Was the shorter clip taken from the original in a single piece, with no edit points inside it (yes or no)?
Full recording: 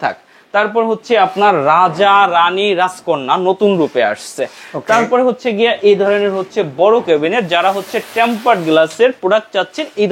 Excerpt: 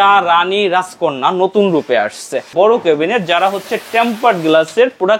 no